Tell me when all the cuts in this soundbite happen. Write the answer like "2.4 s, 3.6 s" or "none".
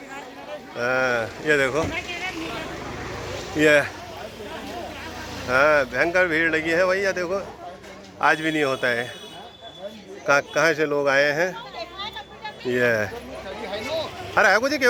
none